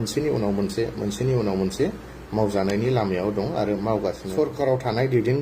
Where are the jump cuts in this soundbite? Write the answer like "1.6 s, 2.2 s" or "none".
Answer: 4.3 s